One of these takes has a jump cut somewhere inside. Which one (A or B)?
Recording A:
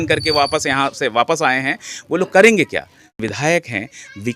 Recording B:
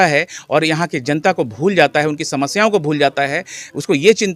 A